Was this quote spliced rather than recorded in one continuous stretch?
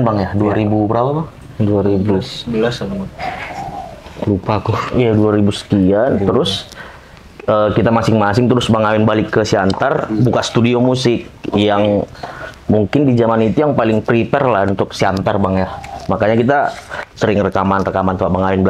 no; 0 cuts

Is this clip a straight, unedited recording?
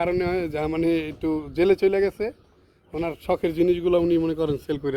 yes; 0 cuts

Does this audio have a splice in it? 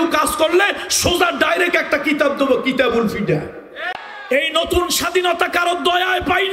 yes; 1 cut; at 4.2 s

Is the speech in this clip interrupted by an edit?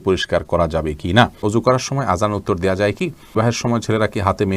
yes; 2 cuts; at 1.4 s, 3.3 s

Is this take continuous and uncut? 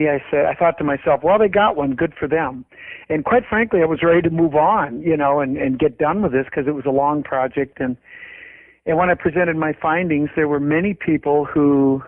no; 1 cut; at 9.4 s

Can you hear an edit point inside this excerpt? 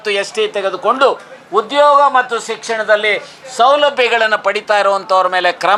no; 0 cuts

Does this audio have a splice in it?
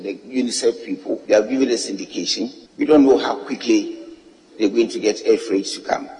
yes; 2 cuts; at 1.2 s, 2.6 s

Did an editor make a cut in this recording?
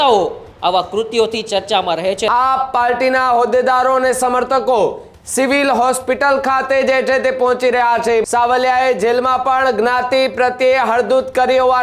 yes; 2 cuts; at 2.2 s, 8.2 s

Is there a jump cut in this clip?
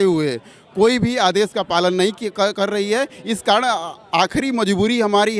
no; 0 cuts

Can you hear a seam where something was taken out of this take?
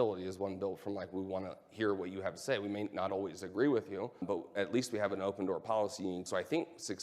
yes; 2 cuts; at 4.2 s, 6.3 s

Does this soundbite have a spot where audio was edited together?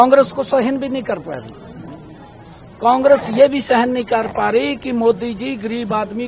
no; 0 cuts

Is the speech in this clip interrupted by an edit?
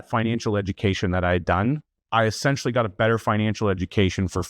yes; 1 cut; at 1.9 s

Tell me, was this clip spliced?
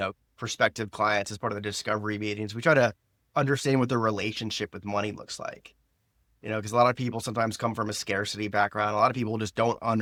no; 0 cuts

